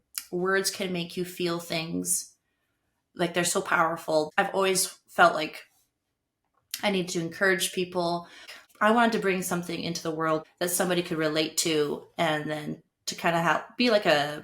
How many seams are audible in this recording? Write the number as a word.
three